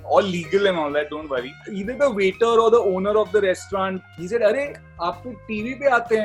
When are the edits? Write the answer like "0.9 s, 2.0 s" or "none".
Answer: 1.7 s, 4.0 s